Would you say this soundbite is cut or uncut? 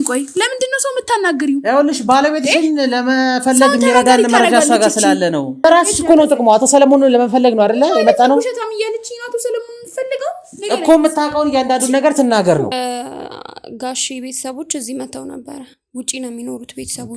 cut